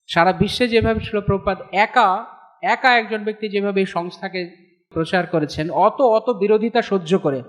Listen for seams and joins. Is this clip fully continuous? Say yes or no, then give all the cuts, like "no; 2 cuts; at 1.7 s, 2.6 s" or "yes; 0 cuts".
no; 1 cut; at 4.9 s